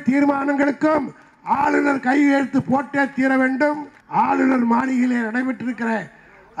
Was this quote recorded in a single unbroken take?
no; 1 cut; at 3.9 s

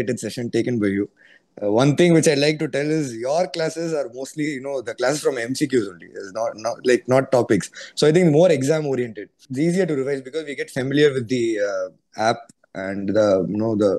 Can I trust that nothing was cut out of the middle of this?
no; 1 cut; at 9.4 s

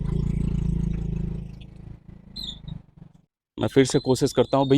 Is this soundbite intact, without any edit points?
yes; 0 cuts

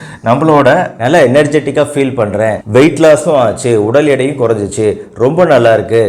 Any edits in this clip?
yes; 1 cut; at 0.9 s

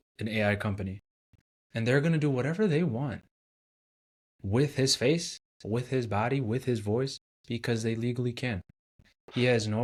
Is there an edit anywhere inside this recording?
no; 0 cuts

